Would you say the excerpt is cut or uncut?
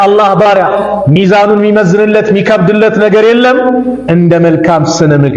uncut